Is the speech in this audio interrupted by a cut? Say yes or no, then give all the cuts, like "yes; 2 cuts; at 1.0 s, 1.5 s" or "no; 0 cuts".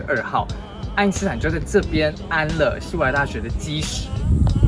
no; 0 cuts